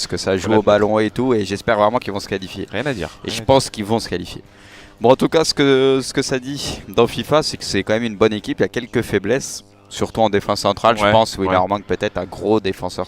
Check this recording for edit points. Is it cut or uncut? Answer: cut